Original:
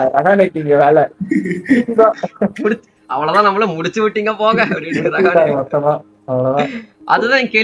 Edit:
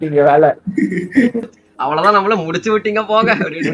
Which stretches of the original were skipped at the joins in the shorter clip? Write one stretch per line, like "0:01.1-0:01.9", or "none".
0:02.0-0:02.7